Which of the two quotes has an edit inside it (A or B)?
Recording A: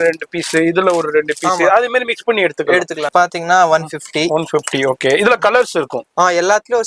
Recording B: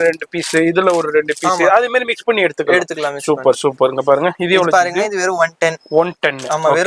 A